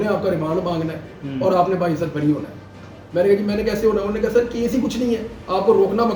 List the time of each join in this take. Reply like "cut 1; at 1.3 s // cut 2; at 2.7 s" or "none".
none